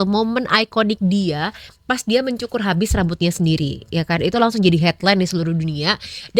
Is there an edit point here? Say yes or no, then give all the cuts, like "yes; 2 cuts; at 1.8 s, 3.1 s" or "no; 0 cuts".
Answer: no; 0 cuts